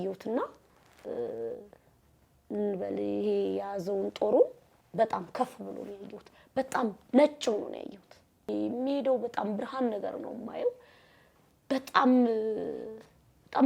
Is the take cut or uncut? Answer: cut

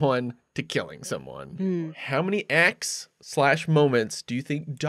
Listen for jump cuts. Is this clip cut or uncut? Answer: cut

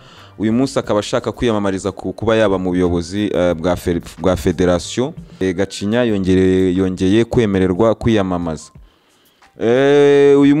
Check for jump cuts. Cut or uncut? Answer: cut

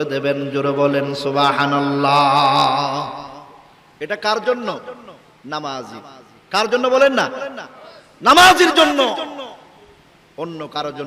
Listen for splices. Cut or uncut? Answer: uncut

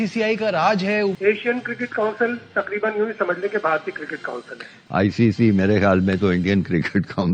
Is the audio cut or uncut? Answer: cut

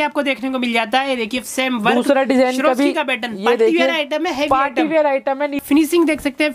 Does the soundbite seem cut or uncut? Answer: cut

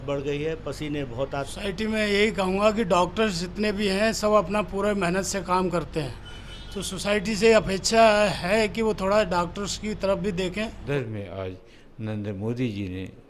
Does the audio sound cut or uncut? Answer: cut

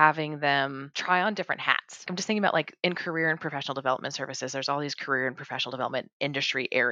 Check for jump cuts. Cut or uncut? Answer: cut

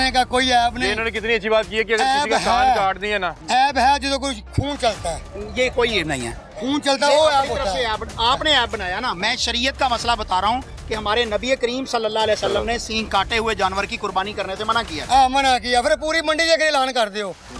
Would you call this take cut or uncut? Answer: uncut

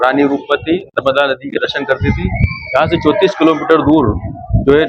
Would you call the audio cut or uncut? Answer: uncut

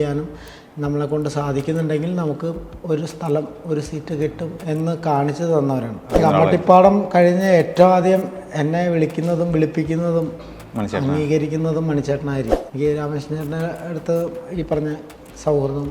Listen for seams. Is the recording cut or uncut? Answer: cut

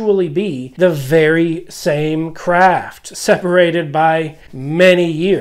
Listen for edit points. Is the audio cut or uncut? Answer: uncut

